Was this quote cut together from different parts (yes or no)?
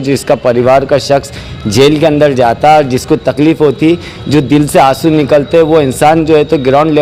no